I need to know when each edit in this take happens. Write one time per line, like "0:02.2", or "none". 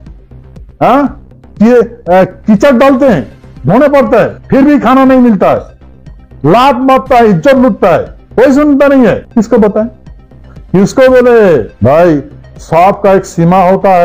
0:04.4
0:08.2
0:09.2
0:11.7